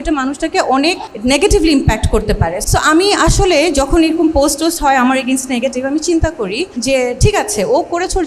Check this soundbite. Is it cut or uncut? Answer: cut